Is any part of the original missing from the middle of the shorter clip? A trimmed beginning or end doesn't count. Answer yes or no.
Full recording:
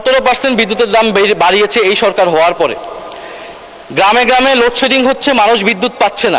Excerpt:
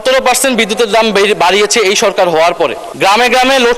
yes